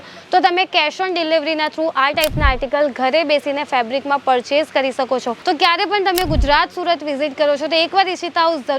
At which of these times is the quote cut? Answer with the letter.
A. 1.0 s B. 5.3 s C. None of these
B